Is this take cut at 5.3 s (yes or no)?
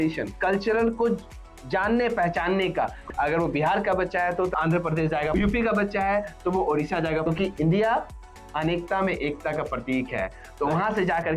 yes